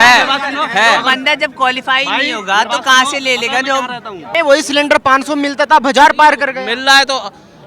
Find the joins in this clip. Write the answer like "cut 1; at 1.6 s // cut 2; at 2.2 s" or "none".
cut 1; at 4.3 s